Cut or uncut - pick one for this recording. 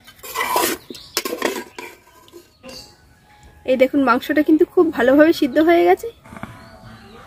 cut